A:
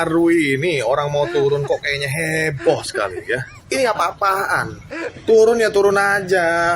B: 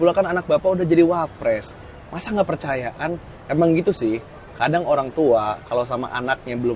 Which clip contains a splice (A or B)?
A